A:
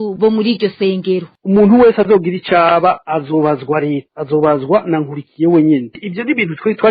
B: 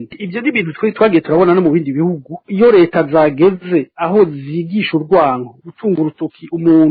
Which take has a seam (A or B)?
A